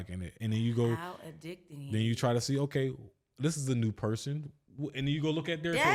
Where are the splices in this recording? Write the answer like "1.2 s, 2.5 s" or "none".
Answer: none